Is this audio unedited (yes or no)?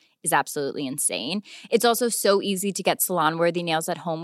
yes